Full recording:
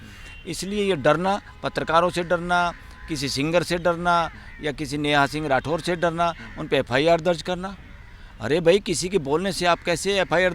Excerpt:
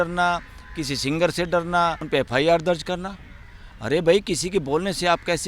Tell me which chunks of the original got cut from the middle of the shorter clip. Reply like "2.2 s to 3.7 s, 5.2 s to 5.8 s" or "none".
4.3 s to 6.6 s

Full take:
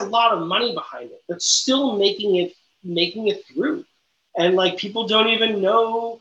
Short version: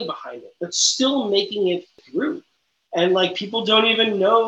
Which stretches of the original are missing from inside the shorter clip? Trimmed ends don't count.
2.7 s to 3.5 s

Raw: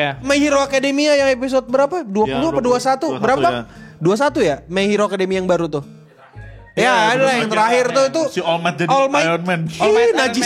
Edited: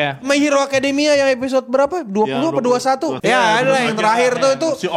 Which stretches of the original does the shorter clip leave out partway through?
3.1 s to 6.7 s

